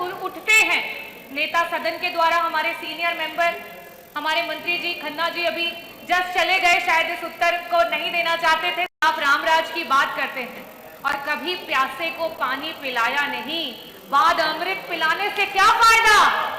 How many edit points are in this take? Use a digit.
1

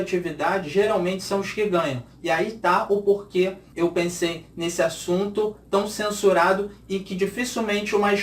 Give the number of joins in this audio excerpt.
1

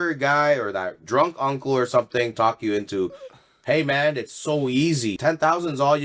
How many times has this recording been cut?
1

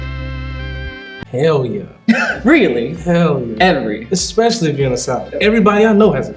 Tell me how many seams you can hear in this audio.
1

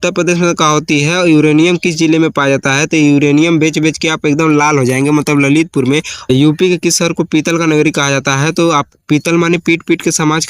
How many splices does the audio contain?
1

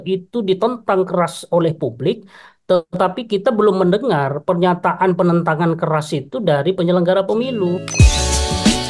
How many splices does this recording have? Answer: 1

